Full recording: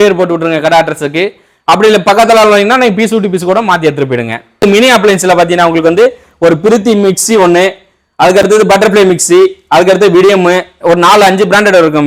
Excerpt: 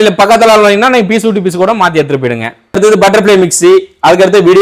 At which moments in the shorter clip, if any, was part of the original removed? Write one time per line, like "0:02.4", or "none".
0:02.7

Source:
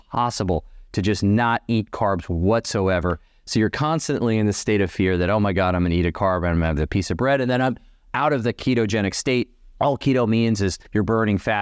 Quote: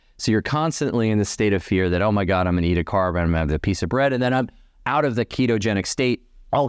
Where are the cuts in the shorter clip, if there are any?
none

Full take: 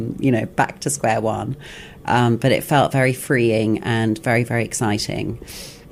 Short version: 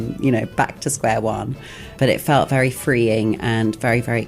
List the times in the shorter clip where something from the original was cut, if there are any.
0:02.0

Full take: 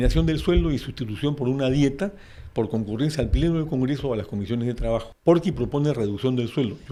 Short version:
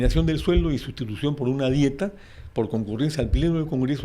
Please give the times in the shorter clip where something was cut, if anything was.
none

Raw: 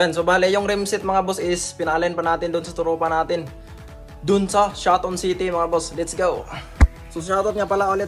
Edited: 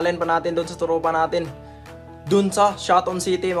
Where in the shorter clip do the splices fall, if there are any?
none

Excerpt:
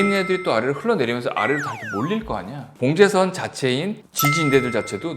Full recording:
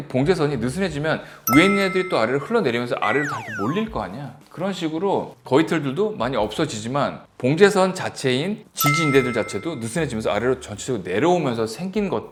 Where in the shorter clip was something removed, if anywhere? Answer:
0:02.6

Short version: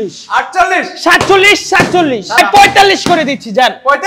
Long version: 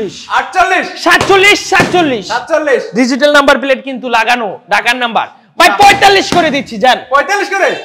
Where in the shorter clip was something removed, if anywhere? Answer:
0:02.4

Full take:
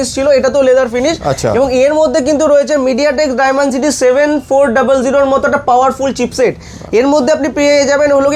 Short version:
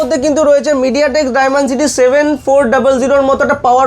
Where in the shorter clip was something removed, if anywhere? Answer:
none

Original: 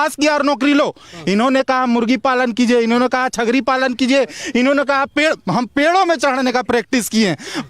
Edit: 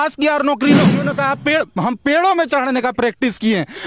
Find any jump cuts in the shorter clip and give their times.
0:01.1

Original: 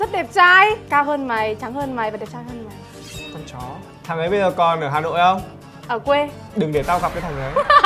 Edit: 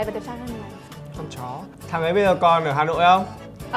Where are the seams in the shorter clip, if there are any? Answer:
0:00.9

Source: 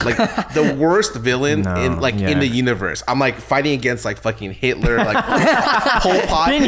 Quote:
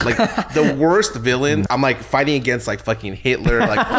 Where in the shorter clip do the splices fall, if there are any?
0:01.7

